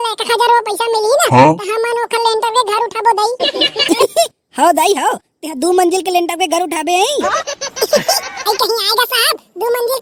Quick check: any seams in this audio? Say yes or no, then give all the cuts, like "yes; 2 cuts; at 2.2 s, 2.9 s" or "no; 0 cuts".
no; 0 cuts